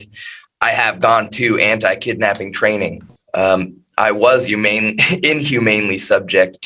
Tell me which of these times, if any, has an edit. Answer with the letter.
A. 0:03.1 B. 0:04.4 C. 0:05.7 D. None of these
D